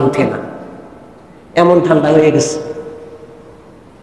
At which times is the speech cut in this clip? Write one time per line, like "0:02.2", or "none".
none

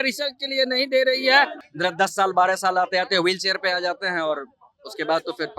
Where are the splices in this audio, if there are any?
0:01.6

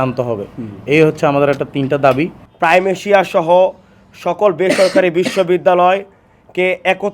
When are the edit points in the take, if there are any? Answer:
0:02.5

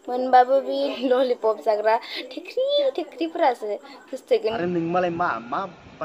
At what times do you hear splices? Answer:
0:00.9
0:04.6

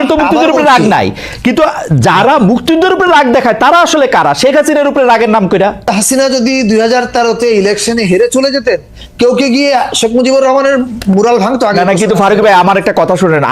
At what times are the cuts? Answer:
0:05.9

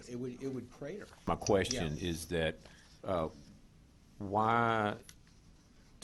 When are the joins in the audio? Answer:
0:01.3

